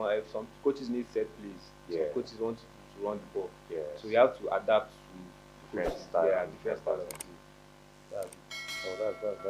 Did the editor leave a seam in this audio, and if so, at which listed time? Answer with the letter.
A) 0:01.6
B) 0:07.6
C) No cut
C